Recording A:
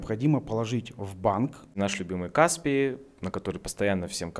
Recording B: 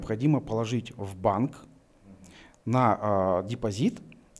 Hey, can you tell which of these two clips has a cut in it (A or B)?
A